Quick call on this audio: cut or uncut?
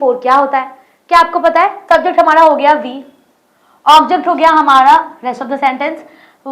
cut